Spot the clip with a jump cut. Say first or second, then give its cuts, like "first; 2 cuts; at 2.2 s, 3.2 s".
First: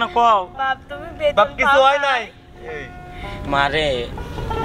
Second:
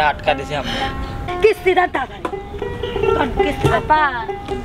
second; 1 cut; at 1.2 s